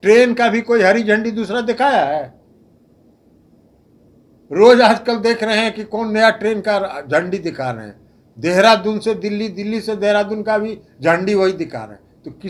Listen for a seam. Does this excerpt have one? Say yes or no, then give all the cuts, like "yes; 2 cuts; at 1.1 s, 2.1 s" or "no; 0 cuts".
no; 0 cuts